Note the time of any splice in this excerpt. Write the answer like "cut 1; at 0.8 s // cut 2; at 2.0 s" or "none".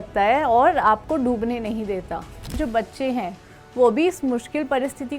cut 1; at 2.5 s